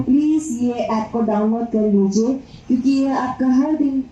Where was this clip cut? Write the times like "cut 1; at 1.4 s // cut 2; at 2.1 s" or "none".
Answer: none